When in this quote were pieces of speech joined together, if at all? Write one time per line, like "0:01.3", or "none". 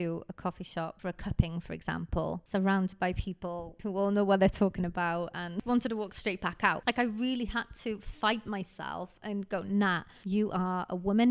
0:01.0
0:02.4
0:03.7
0:05.5
0:06.8
0:10.1